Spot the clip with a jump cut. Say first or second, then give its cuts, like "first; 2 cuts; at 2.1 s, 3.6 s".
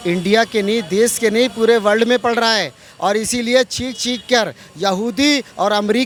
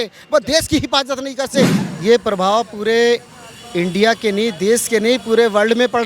second; 1 cut; at 1.8 s